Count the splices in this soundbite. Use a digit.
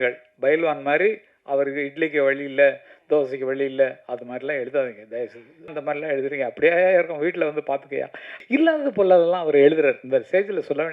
2